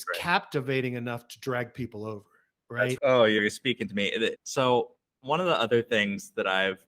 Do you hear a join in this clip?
yes; 2 cuts; at 3.0 s, 4.4 s

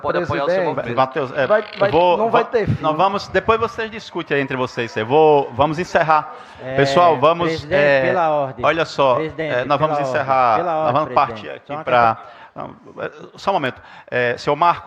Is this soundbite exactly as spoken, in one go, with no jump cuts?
yes; 0 cuts

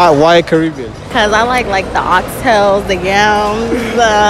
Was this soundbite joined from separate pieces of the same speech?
yes; 1 cut; at 0.9 s

